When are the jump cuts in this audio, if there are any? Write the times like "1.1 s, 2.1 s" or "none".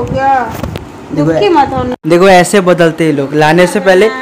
none